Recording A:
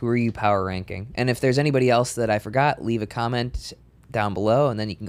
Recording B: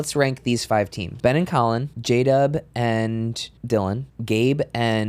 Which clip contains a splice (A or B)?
B